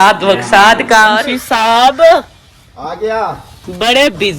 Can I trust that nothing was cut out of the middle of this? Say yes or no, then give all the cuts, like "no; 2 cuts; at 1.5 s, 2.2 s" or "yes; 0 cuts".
no; 1 cut; at 1.2 s